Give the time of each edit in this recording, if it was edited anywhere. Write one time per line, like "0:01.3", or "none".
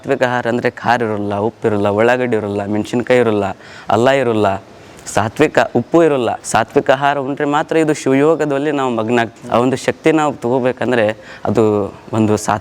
0:06.4
0:09.4